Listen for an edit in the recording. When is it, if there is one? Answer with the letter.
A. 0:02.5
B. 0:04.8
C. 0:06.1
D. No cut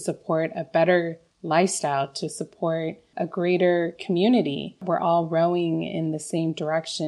B